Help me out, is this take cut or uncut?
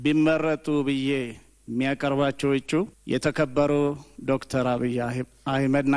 cut